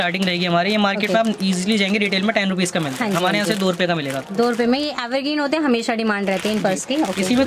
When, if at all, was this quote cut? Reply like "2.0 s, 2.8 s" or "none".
none